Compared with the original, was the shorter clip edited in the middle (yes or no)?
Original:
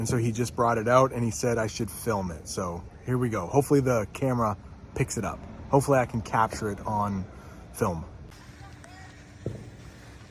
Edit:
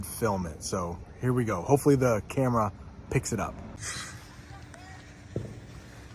yes